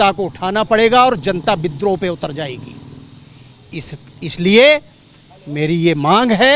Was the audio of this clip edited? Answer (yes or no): no